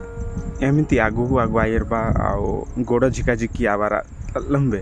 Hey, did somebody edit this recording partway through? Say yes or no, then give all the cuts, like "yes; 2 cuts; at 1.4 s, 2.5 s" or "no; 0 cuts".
no; 0 cuts